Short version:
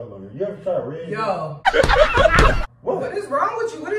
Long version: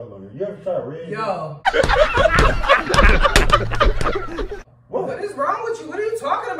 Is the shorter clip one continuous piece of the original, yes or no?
no